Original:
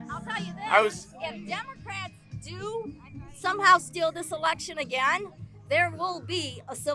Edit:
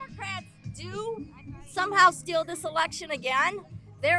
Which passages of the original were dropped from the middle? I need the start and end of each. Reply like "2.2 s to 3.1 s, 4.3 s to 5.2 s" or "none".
none